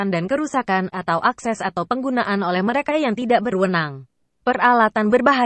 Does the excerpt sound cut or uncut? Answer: cut